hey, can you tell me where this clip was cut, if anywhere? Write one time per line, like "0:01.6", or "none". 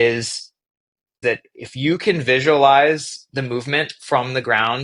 0:01.2